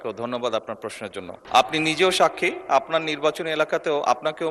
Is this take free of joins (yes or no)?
no